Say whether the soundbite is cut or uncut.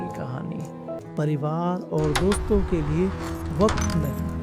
cut